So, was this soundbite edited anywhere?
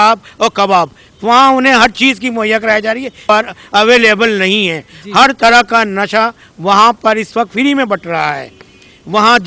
yes; 1 cut; at 3.3 s

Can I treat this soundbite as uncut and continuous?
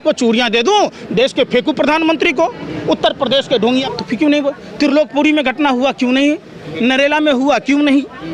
no; 1 cut; at 3.9 s

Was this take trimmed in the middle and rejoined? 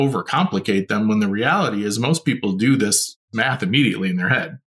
yes; 1 cut; at 3.3 s

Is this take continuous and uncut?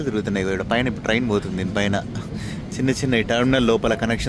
yes; 0 cuts

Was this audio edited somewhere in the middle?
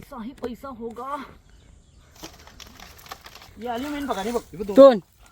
yes; 1 cut; at 3.5 s

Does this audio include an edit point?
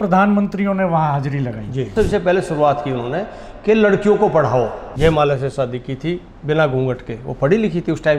yes; 2 cuts; at 1.9 s, 4.8 s

